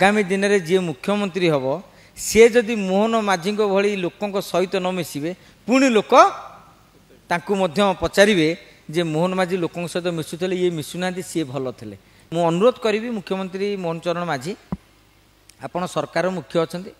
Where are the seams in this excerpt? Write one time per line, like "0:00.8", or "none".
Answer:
0:12.1